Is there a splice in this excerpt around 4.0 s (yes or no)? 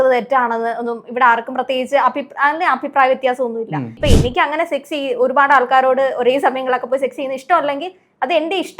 yes